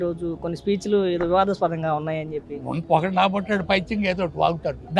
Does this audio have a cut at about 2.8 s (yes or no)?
yes